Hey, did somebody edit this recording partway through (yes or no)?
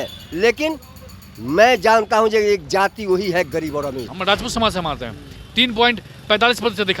yes